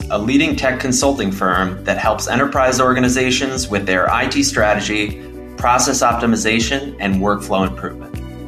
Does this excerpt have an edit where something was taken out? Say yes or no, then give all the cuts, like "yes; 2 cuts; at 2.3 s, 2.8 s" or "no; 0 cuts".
no; 0 cuts